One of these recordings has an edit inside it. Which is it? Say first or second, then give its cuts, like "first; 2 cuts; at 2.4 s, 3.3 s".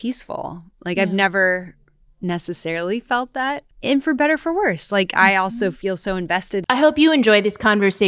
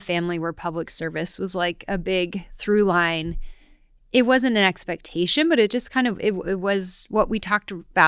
first; 2 cuts; at 3.6 s, 6.6 s